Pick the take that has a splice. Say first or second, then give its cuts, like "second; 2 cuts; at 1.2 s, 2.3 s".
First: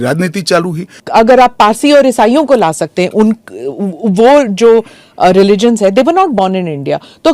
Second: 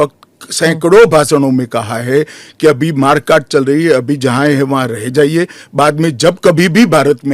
first; 1 cut; at 1.0 s